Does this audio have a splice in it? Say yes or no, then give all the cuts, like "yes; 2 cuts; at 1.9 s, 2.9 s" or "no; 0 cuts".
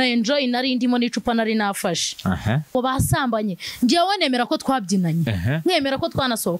yes; 1 cut; at 2.7 s